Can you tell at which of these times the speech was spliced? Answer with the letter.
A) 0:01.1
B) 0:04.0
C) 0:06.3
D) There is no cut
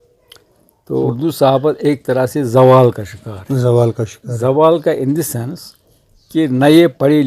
A